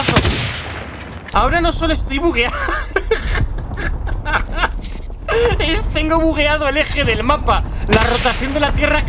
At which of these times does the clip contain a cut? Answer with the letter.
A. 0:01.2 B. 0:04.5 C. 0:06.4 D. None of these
A